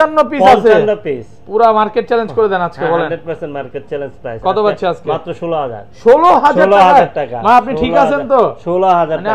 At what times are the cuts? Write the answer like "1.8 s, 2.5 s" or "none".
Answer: none